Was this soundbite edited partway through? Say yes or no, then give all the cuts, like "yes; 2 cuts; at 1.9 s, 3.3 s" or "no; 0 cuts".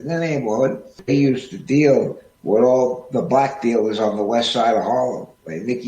yes; 1 cut; at 1.0 s